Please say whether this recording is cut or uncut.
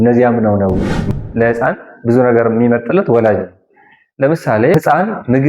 cut